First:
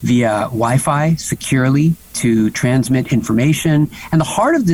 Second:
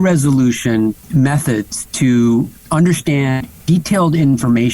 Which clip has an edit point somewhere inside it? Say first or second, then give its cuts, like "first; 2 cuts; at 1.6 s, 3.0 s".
second; 1 cut; at 1.0 s